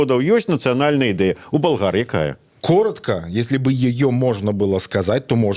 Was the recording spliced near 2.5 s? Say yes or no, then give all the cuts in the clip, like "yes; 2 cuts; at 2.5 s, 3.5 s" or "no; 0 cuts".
yes; 1 cut; at 2.5 s